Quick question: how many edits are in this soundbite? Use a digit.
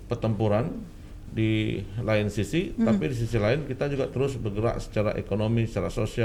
0